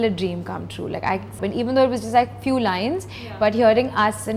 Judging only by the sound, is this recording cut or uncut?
cut